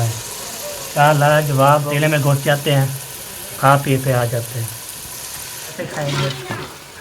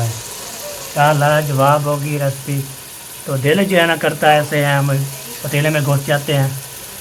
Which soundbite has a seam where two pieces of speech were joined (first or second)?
first